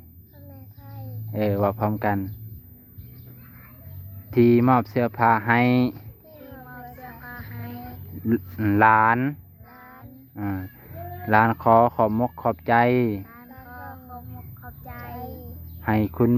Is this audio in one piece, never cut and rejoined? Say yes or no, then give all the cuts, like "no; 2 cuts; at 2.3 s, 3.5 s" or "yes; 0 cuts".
yes; 0 cuts